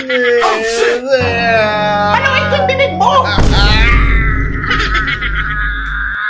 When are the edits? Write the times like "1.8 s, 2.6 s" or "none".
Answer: none

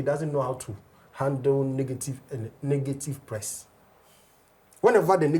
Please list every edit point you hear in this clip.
none

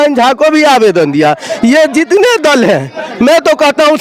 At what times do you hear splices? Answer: none

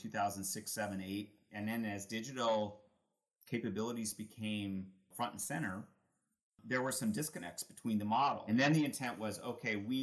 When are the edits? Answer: 1.5 s, 5.1 s, 6.6 s, 8.4 s

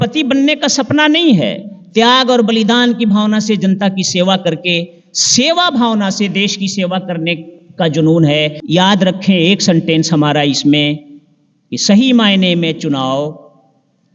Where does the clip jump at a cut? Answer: 8.6 s

